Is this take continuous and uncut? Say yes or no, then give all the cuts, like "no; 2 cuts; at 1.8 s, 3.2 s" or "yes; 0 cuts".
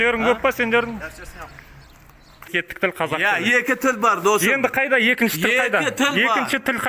no; 1 cut; at 2.5 s